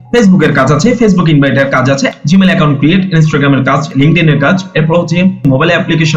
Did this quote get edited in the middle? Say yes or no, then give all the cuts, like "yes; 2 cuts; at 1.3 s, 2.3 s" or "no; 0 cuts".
yes; 1 cut; at 2.1 s